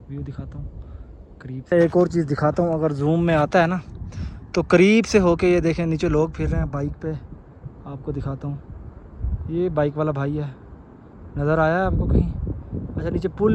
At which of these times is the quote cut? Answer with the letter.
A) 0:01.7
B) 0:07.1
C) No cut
A